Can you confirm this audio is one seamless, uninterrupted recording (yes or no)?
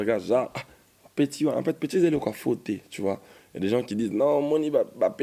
yes